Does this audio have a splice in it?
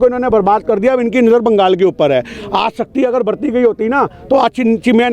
no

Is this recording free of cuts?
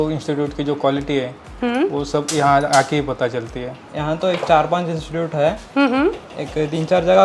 no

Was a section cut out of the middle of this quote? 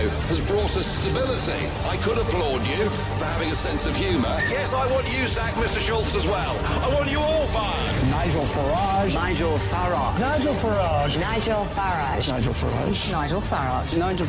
no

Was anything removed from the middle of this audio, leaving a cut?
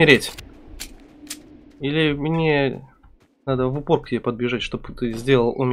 no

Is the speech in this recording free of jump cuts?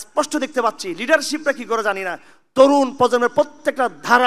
yes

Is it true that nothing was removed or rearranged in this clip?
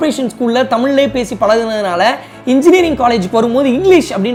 yes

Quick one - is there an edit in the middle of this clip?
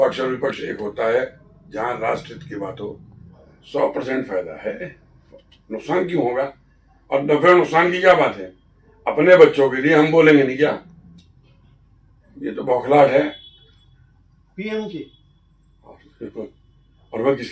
yes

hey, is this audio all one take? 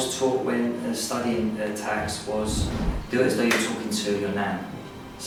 yes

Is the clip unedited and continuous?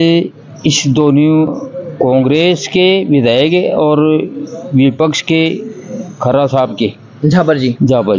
yes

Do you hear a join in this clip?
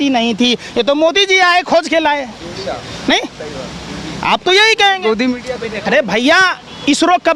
no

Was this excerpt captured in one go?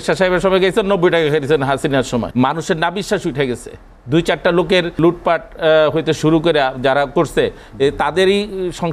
no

